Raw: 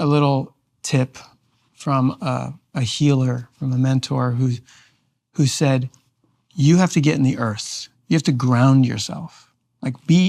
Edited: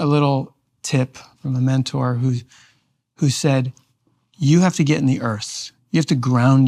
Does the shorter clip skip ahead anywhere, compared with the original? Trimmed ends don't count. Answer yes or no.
yes